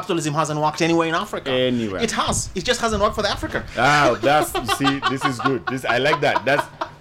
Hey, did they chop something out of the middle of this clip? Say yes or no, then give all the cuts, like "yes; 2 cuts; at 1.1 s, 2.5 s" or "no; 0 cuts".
no; 0 cuts